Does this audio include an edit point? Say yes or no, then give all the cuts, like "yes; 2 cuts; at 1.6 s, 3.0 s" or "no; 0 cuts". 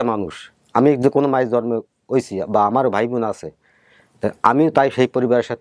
no; 0 cuts